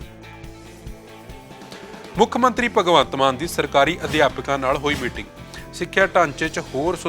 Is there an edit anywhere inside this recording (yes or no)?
yes